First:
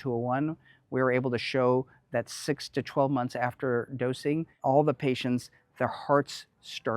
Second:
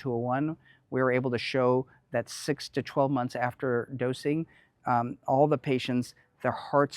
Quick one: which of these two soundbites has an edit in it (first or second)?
first